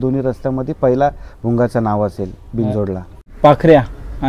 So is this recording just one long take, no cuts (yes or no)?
no